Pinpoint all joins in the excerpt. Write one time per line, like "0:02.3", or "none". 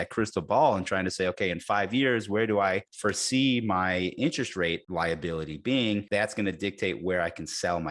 0:02.9
0:04.8
0:06.1